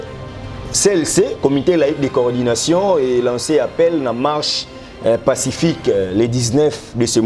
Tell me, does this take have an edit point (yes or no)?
no